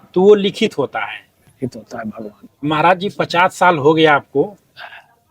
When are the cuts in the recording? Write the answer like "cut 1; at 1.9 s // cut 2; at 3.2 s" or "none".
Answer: cut 1; at 2.4 s